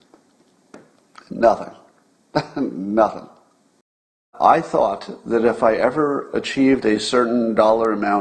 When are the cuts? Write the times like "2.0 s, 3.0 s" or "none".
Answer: 4.3 s